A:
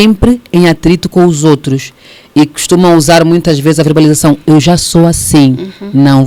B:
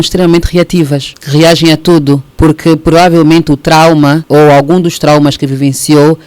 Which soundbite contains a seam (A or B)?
B